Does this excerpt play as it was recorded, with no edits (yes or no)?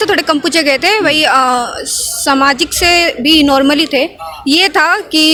yes